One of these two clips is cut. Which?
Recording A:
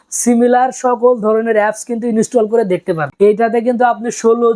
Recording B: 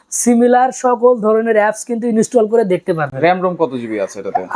A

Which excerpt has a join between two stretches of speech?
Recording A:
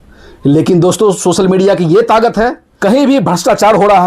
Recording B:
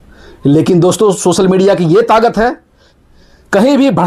A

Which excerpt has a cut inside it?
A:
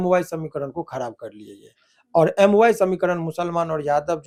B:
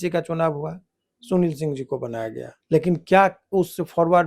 B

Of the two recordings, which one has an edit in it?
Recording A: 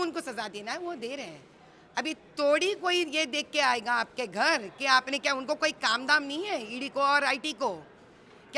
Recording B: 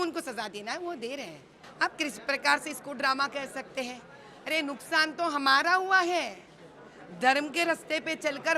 B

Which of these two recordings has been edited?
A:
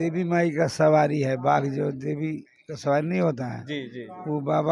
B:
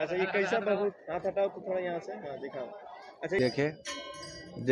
B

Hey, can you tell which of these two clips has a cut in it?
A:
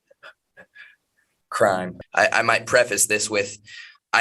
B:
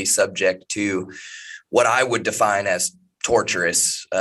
A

